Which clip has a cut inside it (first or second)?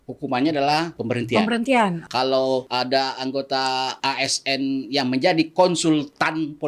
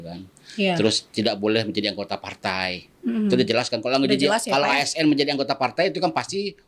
first